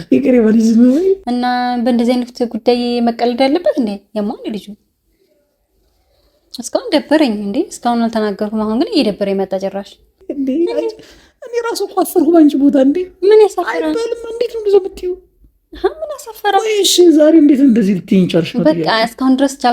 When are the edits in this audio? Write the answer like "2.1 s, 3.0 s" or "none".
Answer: 1.2 s, 10.3 s